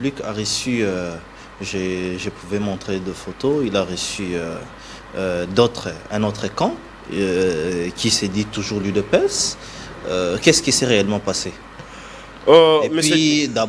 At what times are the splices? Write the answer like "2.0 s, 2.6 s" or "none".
none